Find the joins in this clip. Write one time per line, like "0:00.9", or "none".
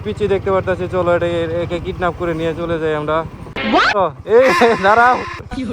0:03.9